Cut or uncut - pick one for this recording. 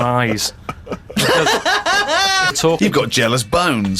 cut